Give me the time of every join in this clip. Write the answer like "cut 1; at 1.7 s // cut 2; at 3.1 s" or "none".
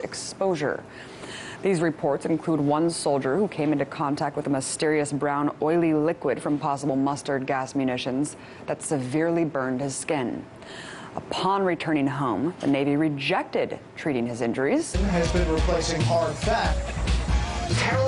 none